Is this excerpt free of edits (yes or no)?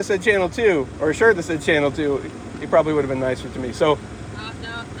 yes